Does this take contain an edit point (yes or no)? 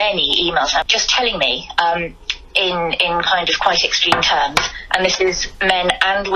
no